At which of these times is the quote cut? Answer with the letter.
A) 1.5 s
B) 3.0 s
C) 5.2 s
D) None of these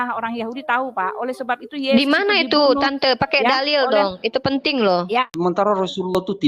C